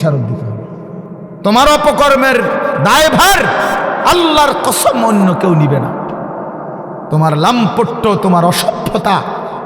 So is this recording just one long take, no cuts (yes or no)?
no